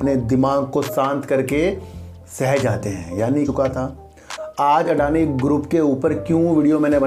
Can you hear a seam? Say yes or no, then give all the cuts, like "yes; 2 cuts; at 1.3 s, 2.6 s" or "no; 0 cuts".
yes; 1 cut; at 3.5 s